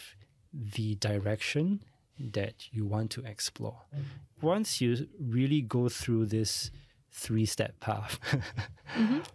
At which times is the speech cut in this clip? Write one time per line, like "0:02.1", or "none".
0:04.2